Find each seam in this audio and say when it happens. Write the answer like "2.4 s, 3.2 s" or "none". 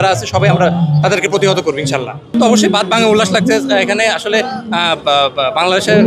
none